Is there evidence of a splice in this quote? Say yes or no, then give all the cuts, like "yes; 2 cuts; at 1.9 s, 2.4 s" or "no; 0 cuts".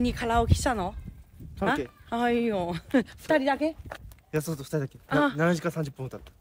no; 0 cuts